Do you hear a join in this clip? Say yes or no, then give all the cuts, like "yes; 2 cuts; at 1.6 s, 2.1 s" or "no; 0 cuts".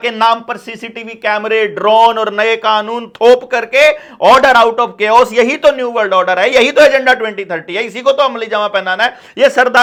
no; 0 cuts